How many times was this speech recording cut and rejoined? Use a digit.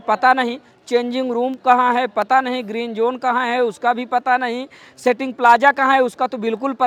0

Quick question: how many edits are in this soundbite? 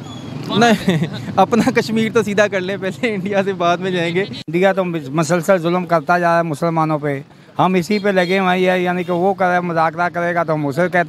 1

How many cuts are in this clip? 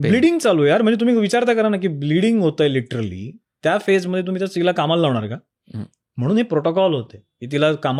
0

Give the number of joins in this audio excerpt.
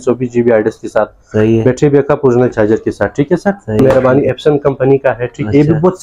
1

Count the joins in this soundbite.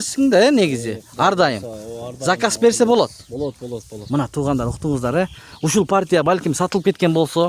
0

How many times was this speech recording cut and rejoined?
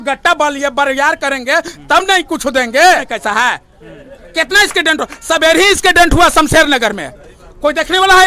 1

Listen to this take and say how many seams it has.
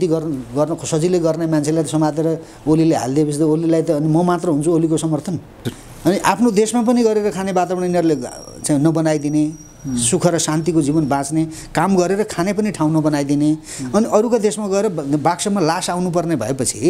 1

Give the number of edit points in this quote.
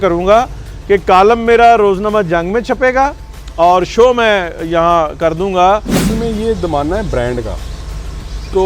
1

